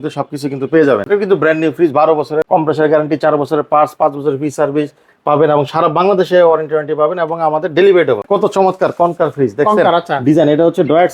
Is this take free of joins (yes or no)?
no